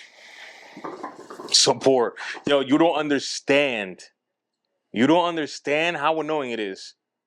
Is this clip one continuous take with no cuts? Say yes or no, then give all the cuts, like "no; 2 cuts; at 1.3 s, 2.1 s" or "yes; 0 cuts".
yes; 0 cuts